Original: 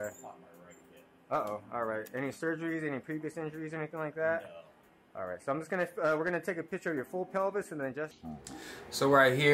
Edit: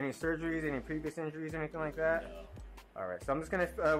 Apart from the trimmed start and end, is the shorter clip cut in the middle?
no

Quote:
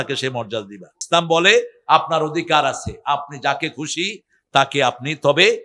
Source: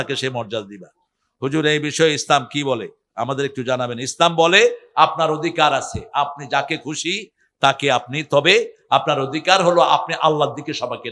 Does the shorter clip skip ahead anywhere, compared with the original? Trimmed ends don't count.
yes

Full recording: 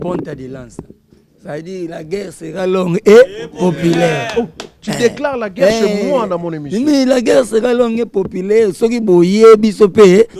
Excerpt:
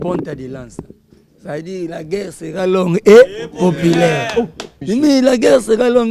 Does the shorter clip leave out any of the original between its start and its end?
yes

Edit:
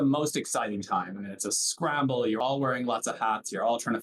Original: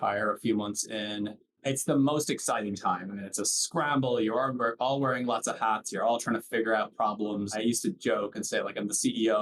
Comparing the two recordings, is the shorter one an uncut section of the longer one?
no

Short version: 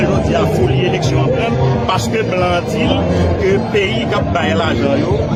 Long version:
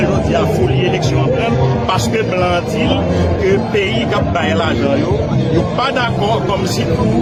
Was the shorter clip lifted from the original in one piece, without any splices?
yes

